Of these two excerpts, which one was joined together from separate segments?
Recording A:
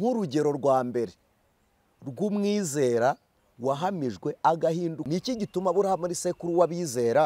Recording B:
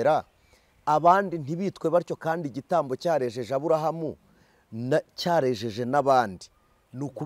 A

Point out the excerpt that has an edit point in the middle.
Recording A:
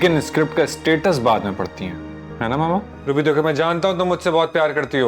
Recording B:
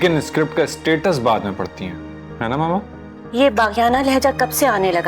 A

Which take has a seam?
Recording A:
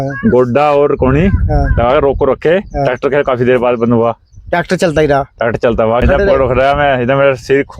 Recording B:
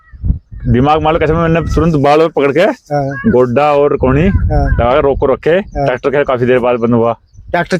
A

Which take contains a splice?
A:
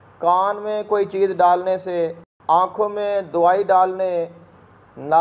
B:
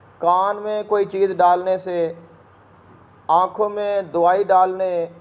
A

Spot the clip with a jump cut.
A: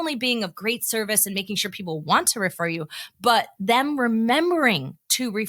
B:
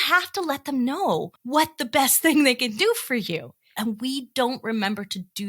B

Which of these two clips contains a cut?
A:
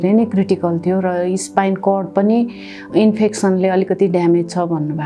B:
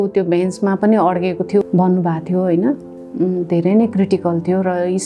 B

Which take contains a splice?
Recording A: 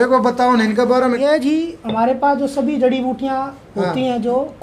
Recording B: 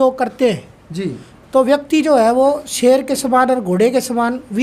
A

